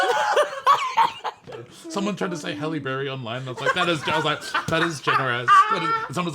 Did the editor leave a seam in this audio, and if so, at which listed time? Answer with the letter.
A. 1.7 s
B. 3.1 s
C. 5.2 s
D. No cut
A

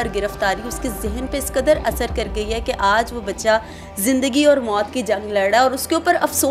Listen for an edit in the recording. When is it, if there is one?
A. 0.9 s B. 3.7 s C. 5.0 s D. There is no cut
D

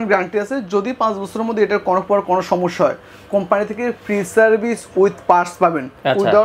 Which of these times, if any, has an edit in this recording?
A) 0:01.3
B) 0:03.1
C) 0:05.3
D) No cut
D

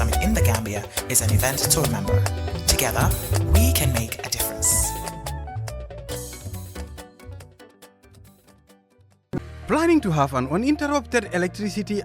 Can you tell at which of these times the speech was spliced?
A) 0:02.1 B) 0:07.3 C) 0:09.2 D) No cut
C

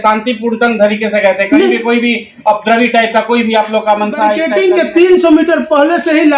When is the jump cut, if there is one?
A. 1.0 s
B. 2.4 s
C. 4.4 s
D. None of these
C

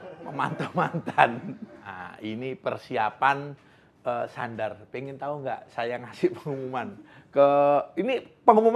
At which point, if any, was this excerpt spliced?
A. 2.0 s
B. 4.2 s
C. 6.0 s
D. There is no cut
A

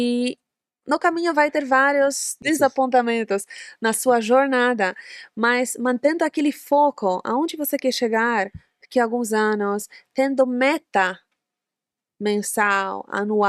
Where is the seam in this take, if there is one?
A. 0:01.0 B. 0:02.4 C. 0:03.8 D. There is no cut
B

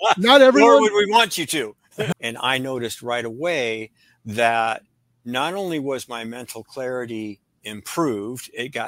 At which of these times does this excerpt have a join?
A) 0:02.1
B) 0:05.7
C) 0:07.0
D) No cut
A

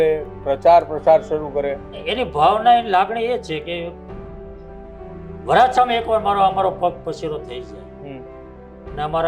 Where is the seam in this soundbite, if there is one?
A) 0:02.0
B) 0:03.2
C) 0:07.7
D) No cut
A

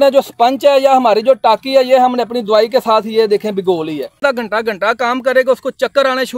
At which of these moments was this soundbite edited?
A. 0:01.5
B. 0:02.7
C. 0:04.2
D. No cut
C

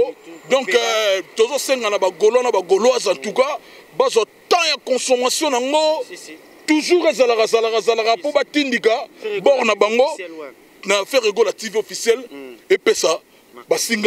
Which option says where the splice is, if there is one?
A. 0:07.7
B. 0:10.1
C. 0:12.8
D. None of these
D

